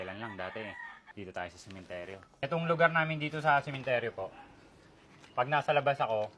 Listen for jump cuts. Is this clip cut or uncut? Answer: cut